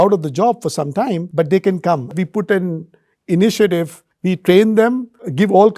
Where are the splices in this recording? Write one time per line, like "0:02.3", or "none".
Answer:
0:01.3
0:02.1
0:04.2

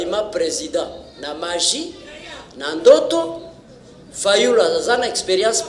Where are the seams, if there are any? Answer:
none

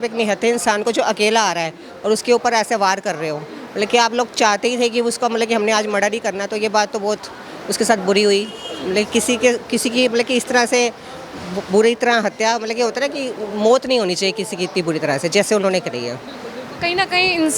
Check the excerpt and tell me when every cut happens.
none

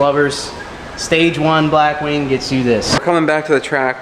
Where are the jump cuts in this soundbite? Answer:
0:03.0

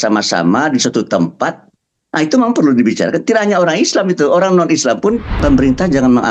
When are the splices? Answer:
0:05.4

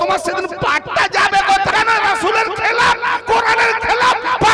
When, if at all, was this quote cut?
0:01.7

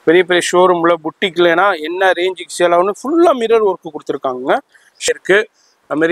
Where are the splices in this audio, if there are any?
0:05.0

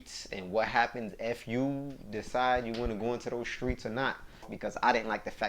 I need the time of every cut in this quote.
0:04.5

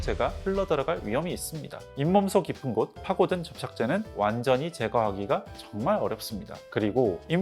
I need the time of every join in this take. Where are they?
0:01.8
0:03.0

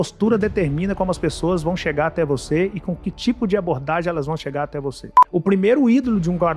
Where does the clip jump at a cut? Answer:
0:05.2

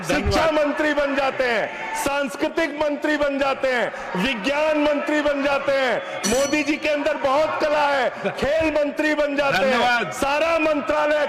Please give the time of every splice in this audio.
none

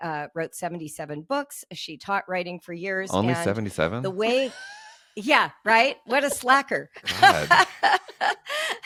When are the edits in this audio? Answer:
none

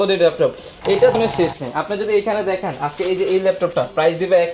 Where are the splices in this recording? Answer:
0:01.2

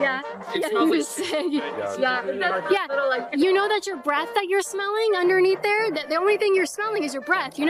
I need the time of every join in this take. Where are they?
none

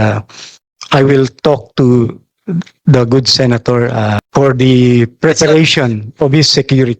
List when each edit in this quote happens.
0:04.2

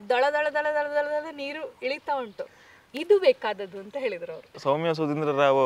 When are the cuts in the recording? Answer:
0:04.5

